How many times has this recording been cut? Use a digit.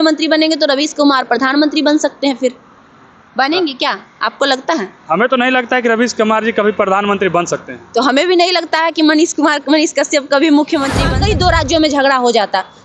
1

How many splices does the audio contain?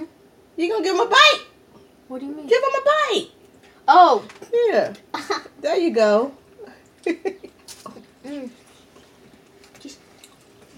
0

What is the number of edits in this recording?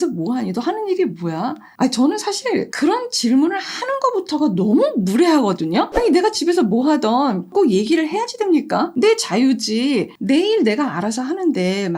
2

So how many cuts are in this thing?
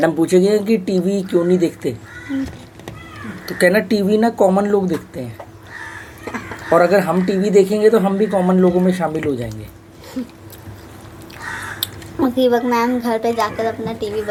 0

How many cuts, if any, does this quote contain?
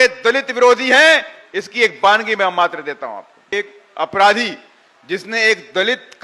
1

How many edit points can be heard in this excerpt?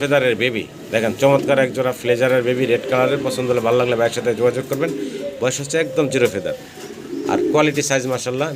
0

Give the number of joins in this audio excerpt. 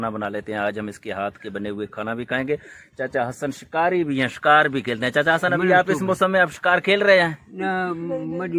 0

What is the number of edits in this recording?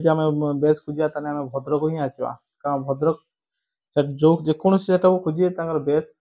0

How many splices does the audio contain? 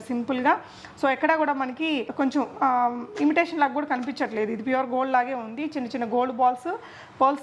0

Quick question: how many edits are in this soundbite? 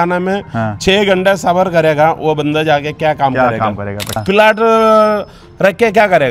1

